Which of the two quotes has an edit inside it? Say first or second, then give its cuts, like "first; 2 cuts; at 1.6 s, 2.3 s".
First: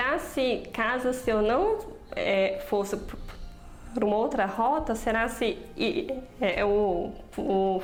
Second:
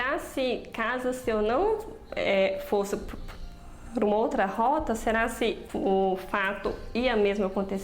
second; 1 cut; at 5.6 s